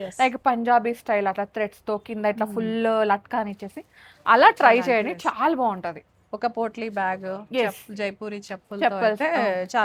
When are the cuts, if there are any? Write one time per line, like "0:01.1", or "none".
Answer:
none